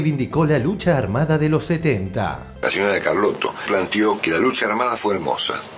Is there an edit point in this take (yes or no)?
yes